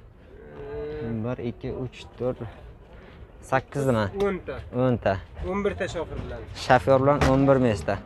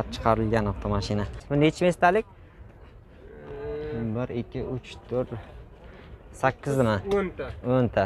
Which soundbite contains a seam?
second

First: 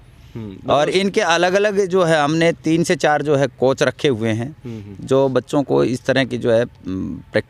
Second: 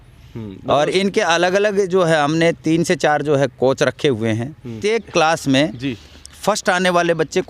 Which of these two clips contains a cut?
second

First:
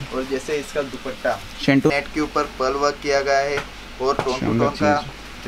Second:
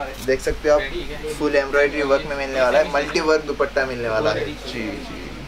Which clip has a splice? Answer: first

